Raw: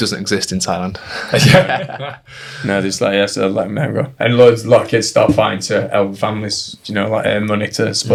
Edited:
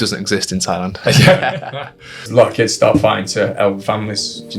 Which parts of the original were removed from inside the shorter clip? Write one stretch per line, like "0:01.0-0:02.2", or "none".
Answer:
0:00.9-0:01.2
0:02.5-0:04.6